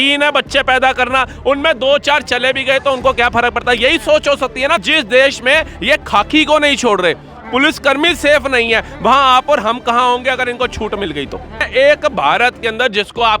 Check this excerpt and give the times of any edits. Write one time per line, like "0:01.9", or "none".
0:04.8
0:11.7